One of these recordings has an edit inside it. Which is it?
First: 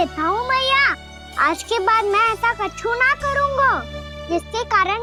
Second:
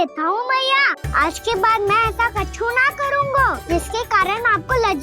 second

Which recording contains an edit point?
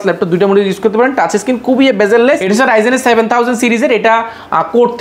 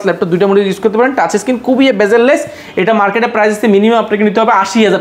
first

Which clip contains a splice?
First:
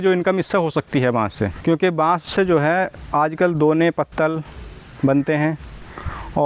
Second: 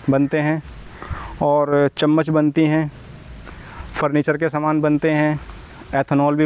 first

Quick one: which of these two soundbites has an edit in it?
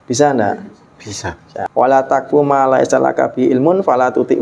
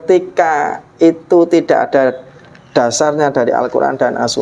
first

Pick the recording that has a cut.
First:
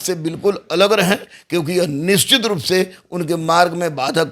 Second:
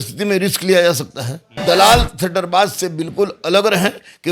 second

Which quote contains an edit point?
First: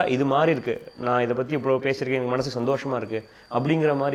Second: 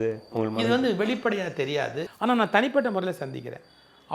second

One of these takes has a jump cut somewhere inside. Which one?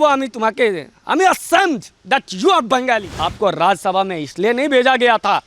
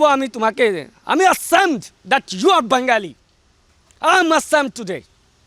first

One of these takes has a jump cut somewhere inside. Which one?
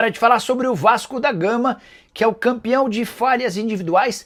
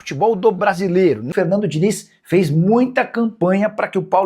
second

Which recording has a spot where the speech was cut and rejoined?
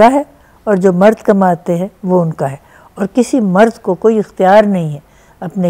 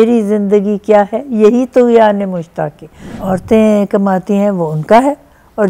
second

